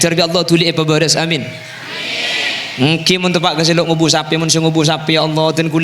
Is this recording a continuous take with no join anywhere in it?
yes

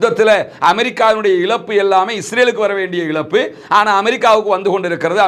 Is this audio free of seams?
yes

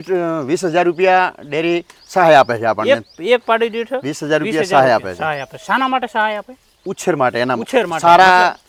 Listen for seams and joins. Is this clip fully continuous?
yes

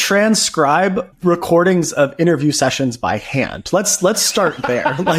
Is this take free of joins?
no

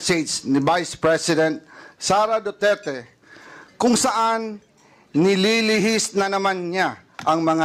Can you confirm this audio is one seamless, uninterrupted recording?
yes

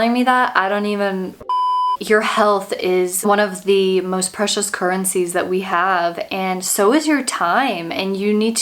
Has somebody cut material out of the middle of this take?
yes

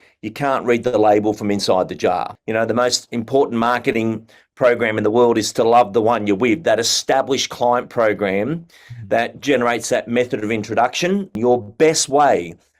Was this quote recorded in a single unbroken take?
no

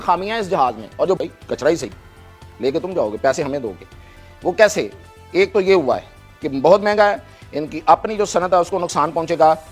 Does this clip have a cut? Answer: yes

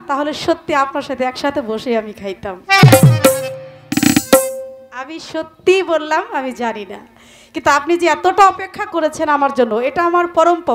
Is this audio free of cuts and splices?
yes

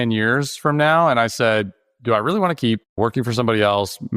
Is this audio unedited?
no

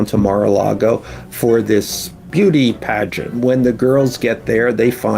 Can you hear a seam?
yes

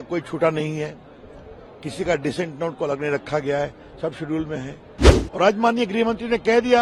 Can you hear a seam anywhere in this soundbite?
no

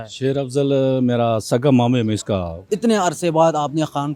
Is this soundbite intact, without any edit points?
no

